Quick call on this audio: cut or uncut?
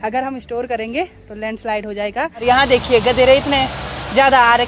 cut